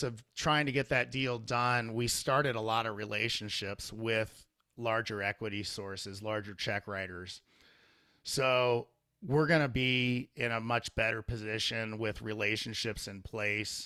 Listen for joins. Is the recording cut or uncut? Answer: uncut